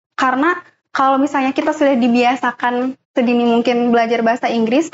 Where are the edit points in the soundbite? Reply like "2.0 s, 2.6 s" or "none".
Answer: none

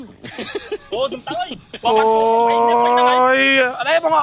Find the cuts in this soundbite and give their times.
1.0 s

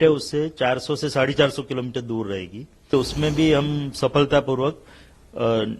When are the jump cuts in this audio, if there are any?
2.9 s

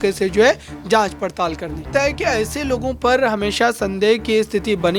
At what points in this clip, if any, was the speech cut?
1.9 s

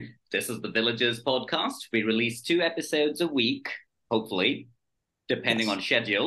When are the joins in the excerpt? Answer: none

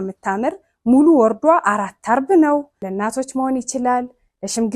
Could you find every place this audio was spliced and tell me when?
2.8 s

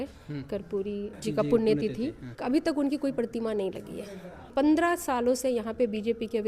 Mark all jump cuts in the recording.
1.1 s, 2.3 s, 4.5 s

